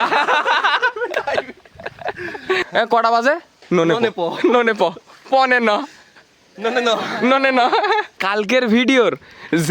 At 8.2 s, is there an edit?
yes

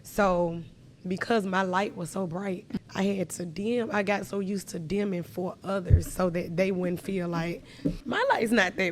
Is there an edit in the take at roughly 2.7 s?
yes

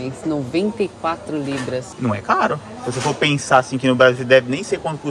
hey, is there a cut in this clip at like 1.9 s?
yes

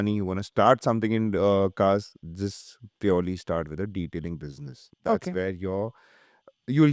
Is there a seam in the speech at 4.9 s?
no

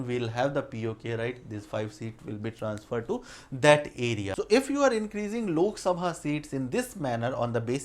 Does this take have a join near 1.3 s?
no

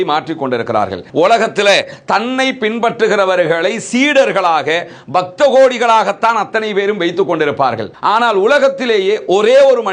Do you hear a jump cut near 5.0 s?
no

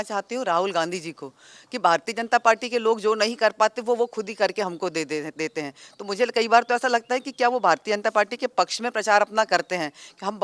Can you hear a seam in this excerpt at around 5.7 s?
no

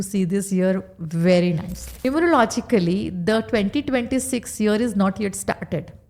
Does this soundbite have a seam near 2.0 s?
yes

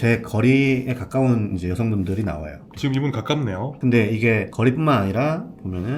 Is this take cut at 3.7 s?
yes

